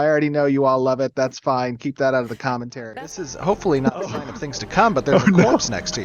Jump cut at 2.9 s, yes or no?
yes